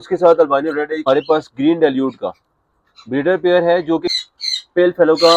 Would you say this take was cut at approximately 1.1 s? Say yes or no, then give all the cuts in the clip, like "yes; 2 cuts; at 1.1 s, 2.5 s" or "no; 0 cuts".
yes; 2 cuts; at 1.1 s, 4.1 s